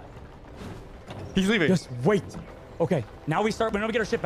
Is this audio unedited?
no; 1 cut; at 0.9 s

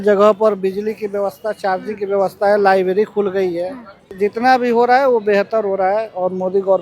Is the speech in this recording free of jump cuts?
no; 1 cut; at 4.0 s

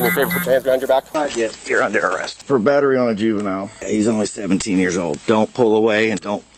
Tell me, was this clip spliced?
yes; 1 cut; at 1.1 s

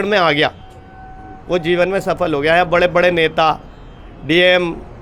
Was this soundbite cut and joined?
no; 0 cuts

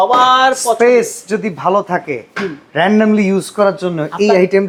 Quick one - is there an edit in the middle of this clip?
no; 0 cuts

